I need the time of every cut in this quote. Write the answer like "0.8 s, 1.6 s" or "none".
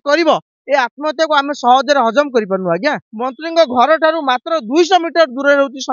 3.1 s